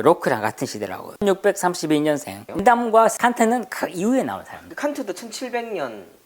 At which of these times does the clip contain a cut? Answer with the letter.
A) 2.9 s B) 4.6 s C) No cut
B